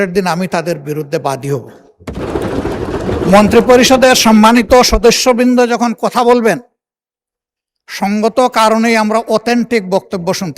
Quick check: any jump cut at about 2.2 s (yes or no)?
yes